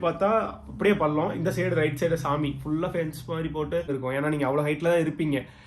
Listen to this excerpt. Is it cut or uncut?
cut